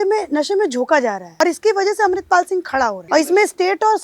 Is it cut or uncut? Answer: cut